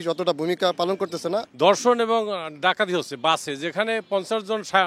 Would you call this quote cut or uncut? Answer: cut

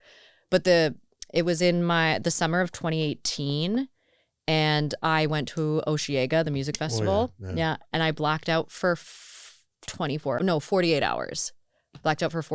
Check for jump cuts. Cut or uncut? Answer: cut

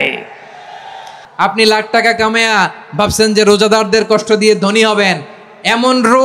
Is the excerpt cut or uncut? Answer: cut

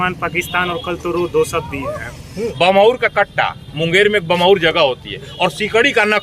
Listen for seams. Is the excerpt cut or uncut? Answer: cut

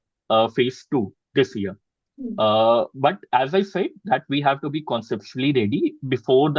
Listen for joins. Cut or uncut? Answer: uncut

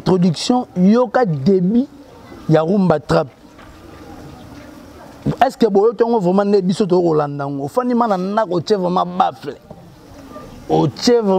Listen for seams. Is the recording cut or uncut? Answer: uncut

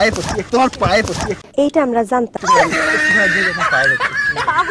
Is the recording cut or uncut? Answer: cut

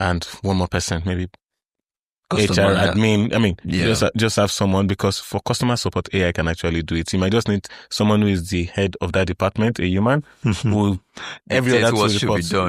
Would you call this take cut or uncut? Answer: uncut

